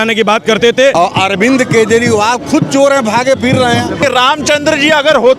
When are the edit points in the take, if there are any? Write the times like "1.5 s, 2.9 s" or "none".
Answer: 0.9 s, 4.0 s

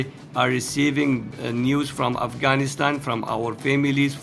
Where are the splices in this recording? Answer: 1.3 s

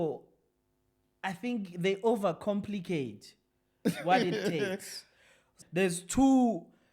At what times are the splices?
5.5 s

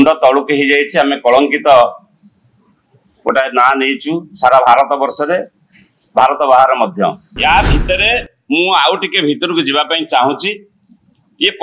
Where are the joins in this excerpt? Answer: 7.3 s

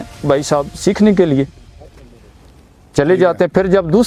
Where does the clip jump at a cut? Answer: none

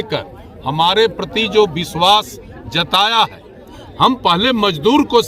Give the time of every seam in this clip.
3.8 s

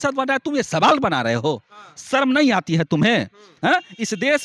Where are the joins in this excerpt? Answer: none

